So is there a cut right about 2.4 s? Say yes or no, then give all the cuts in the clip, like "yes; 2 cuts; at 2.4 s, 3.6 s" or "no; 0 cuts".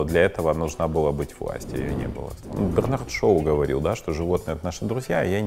yes; 1 cut; at 2.4 s